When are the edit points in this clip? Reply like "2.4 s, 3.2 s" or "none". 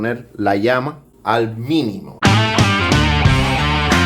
1.0 s, 2.1 s